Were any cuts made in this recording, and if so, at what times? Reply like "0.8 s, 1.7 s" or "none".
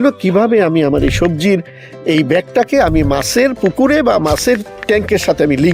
none